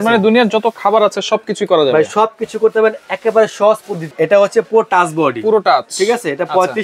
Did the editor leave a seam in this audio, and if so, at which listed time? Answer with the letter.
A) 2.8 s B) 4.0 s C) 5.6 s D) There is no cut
B